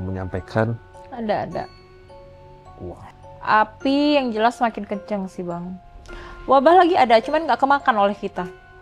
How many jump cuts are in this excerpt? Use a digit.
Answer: 1